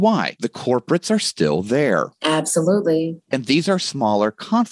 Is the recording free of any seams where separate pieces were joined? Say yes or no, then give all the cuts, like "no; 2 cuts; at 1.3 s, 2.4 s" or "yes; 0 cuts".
yes; 0 cuts